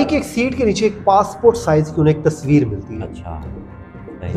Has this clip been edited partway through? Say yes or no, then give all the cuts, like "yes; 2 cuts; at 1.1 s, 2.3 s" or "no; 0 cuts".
no; 0 cuts